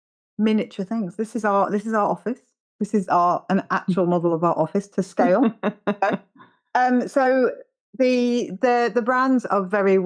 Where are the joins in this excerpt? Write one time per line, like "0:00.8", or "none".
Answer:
none